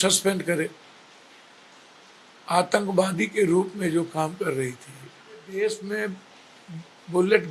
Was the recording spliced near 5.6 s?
yes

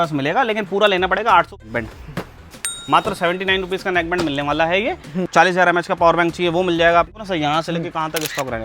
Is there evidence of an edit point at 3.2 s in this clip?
no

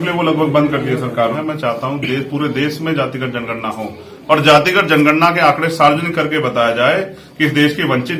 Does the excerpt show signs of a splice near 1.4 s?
yes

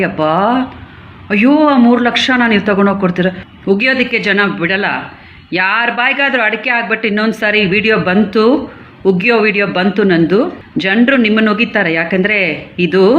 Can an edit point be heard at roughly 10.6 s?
yes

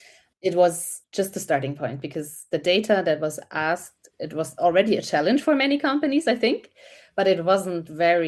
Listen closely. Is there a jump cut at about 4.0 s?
yes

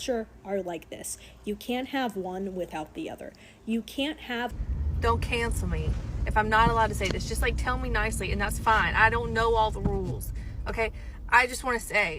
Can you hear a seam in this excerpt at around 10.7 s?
no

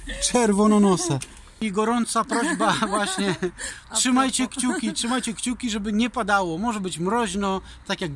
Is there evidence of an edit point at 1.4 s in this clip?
yes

